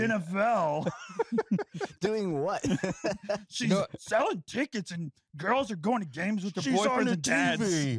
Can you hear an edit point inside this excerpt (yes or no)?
no